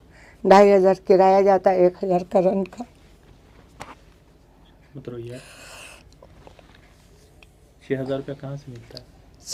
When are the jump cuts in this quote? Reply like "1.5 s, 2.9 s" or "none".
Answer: none